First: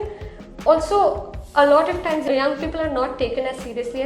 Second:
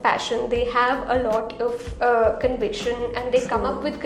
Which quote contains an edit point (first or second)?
first